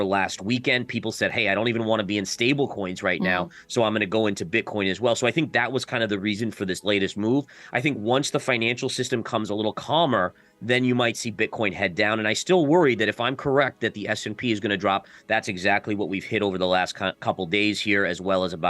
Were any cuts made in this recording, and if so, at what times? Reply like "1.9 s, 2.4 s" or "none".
15.2 s